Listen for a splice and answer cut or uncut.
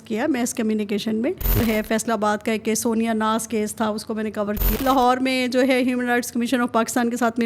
cut